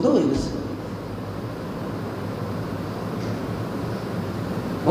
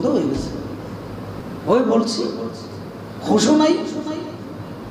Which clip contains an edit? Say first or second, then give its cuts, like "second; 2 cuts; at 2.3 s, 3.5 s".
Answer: second; 1 cut; at 1.5 s